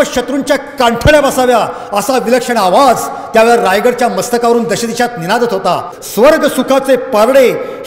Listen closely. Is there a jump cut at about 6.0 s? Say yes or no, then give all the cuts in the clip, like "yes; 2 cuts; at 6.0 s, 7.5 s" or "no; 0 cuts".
yes; 1 cut; at 6.0 s